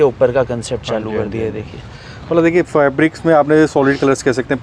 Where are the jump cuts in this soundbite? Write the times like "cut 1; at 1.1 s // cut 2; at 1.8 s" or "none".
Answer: none